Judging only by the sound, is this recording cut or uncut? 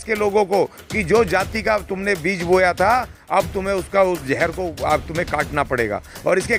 uncut